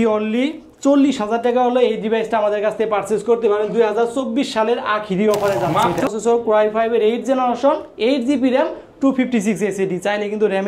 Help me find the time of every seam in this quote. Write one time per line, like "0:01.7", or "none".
0:06.1